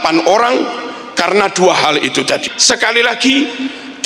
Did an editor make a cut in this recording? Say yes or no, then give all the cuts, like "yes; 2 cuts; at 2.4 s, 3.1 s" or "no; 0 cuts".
yes; 1 cut; at 2.5 s